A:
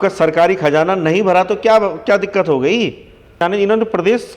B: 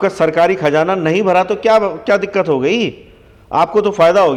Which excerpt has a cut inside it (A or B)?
A